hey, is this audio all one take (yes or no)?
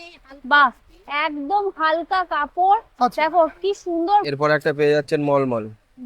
no